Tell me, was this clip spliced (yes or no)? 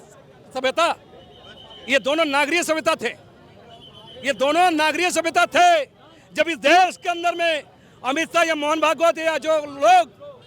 no